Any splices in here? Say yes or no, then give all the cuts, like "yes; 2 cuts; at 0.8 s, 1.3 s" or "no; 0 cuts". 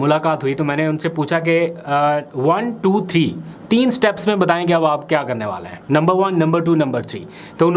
no; 0 cuts